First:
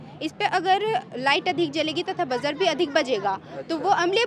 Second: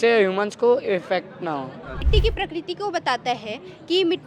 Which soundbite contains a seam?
second; 1 cut; at 2.1 s

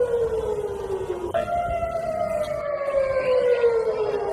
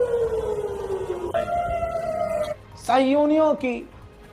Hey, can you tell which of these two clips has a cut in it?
second; 1 cut; at 2.6 s

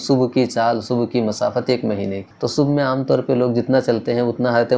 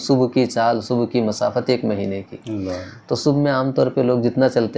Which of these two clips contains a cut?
first; 1 cut; at 2.3 s

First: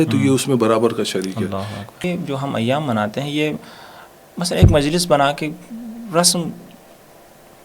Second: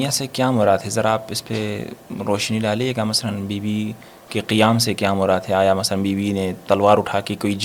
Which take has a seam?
first; 1 cut; at 2.0 s

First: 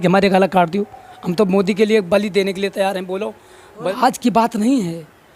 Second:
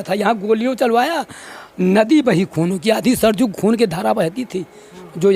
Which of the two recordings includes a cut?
first; 1 cut; at 3.9 s

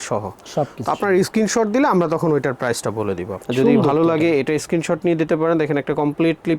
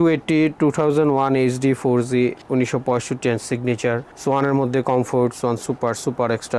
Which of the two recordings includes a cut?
first; 1 cut; at 3.4 s

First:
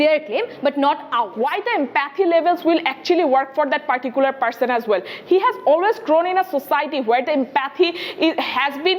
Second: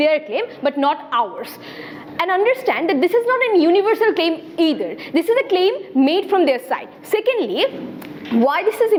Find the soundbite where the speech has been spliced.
first; 1 cut; at 1.3 s

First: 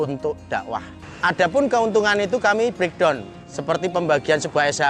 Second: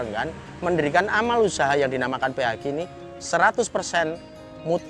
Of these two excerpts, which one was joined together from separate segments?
first; 1 cut; at 1.0 s

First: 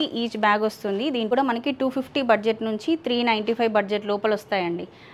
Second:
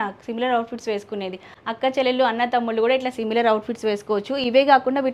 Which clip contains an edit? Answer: first; 1 cut; at 1.3 s

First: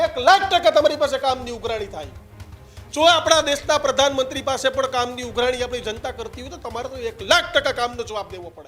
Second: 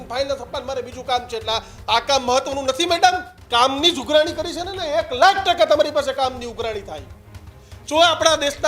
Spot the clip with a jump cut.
second; 1 cut; at 3.3 s

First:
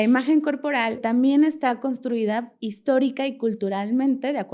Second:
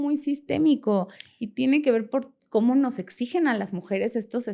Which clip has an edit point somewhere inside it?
first; 1 cut; at 1.0 s

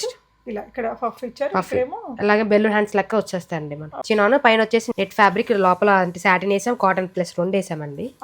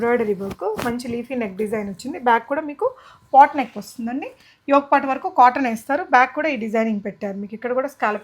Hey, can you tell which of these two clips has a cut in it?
first; 2 cuts; at 3.9 s, 4.9 s

